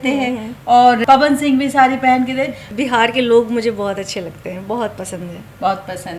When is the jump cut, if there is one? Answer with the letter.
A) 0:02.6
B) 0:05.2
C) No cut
A